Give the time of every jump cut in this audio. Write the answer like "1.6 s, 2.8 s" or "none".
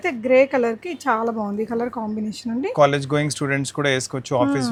none